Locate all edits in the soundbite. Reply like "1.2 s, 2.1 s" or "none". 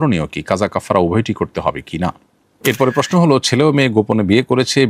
2.5 s